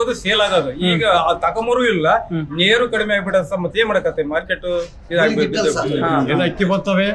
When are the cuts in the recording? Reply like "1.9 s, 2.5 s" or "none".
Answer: 6.1 s